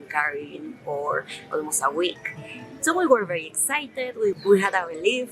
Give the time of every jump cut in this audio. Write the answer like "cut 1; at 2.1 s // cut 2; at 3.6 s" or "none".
cut 1; at 4.4 s